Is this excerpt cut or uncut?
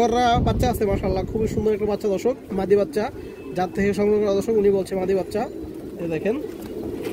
uncut